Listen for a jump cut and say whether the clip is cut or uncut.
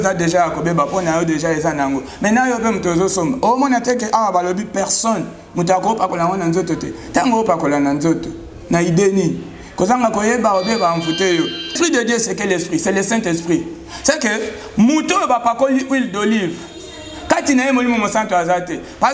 cut